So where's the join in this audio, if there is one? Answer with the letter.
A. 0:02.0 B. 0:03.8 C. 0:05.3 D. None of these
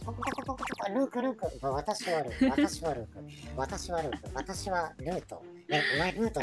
D